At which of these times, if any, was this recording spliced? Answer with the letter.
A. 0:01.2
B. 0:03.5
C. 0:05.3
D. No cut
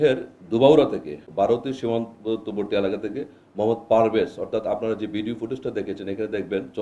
A